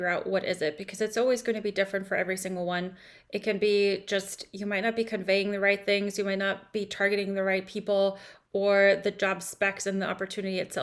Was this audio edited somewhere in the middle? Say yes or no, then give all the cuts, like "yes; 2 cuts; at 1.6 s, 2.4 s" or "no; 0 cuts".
no; 0 cuts